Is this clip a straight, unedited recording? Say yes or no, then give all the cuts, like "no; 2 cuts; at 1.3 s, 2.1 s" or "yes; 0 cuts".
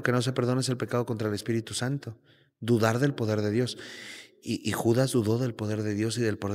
yes; 0 cuts